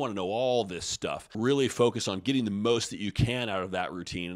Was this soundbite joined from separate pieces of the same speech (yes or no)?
yes